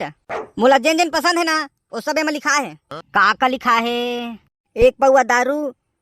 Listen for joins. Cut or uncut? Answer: cut